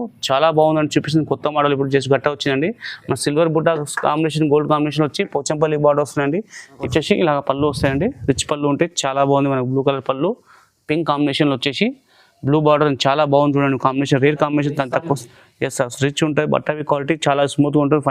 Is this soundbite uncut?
no; 1 cut; at 6.8 s

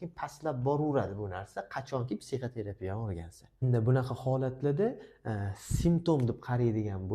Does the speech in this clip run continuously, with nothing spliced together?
no; 1 cut; at 3.6 s

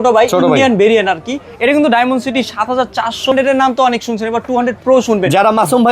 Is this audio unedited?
no; 1 cut; at 3.3 s

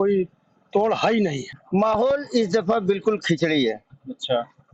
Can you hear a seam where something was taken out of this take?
yes; 1 cut; at 1.5 s

